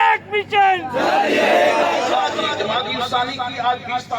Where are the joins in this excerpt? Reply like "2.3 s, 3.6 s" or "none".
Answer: 2.4 s